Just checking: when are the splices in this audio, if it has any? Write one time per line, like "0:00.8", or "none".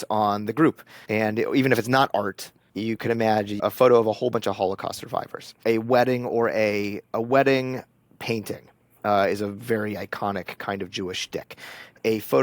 0:00.9
0:03.6
0:05.6